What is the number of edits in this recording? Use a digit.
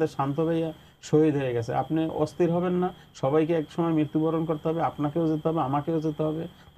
0